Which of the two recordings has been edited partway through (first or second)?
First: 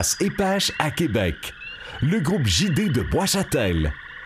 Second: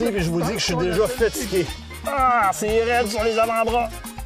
second